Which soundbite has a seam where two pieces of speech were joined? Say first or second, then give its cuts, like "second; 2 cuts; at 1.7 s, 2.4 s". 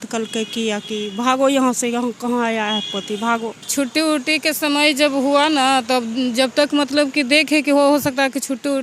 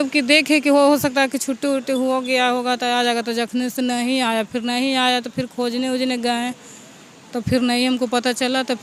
first; 1 cut; at 3.6 s